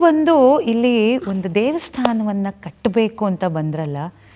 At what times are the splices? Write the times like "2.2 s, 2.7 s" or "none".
none